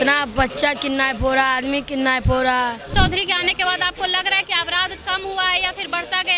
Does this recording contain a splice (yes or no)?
yes